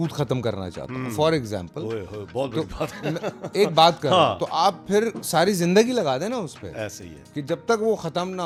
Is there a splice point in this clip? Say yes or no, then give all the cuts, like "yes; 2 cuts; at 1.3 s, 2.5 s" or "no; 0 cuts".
no; 0 cuts